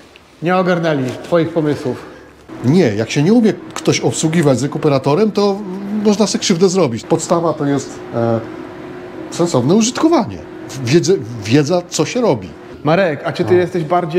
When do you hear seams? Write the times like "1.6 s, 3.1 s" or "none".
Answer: 2.4 s, 7.0 s, 12.7 s